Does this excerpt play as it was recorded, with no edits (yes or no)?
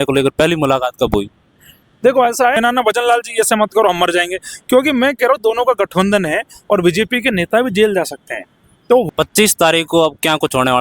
no